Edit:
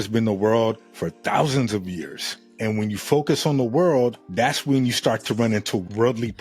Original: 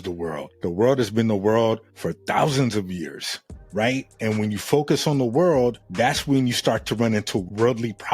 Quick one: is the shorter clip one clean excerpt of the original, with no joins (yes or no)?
no